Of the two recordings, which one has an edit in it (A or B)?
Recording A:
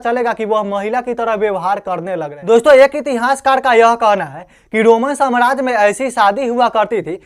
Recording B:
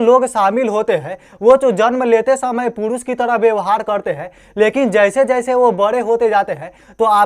A